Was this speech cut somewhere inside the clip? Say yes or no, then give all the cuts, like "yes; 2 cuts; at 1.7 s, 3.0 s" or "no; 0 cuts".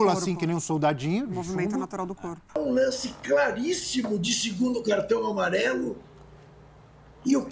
yes; 1 cut; at 2.6 s